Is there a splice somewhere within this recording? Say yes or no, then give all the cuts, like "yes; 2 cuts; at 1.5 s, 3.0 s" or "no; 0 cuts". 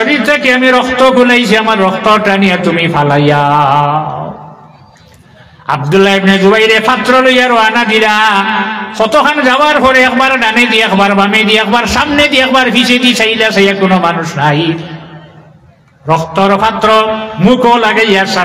no; 0 cuts